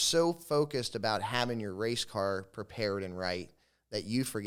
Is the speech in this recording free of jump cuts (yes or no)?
yes